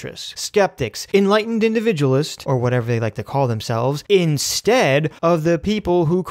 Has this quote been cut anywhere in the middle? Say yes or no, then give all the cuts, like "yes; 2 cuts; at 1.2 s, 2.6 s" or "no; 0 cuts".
yes; 3 cuts; at 0.7 s, 2.4 s, 5.1 s